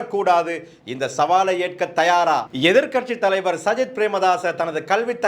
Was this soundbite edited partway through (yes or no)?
yes